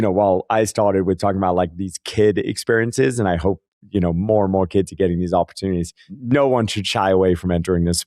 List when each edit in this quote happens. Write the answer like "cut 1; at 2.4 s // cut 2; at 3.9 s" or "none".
cut 1; at 6.1 s